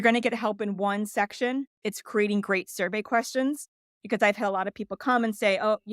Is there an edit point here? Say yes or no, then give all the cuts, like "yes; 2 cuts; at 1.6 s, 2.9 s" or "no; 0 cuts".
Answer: yes; 1 cut; at 1.8 s